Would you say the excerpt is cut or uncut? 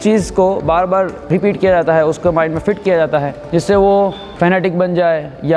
uncut